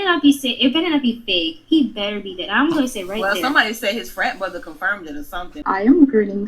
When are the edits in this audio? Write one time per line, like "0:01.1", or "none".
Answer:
0:05.6